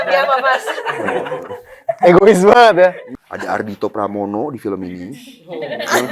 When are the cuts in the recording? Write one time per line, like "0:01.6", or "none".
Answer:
0:03.0